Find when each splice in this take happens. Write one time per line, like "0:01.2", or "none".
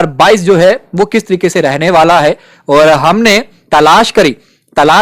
none

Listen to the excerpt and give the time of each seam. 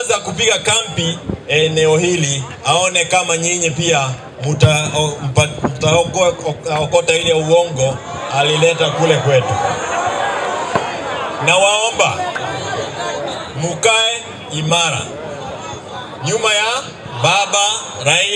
none

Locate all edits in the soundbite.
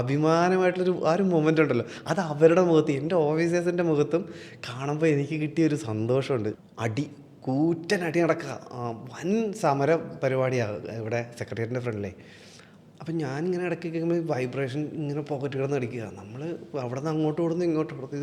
0:06.5

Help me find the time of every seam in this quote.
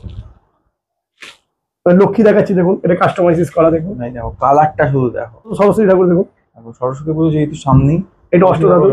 0:05.6

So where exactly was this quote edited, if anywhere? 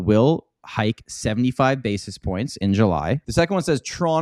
0:03.2

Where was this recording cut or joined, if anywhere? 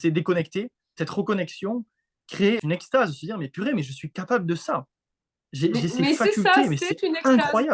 0:01.0
0:02.6

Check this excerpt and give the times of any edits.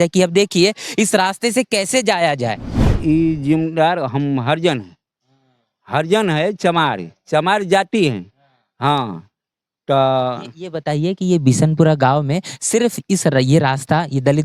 0:02.9

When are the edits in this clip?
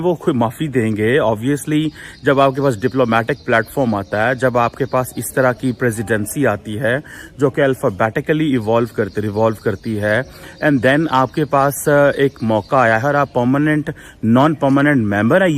none

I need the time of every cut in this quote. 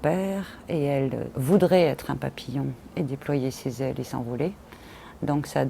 0:01.3

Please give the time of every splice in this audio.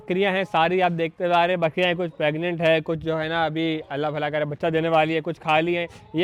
none

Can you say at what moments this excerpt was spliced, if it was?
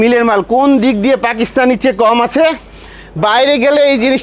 none

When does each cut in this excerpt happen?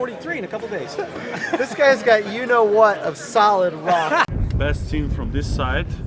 0:04.3

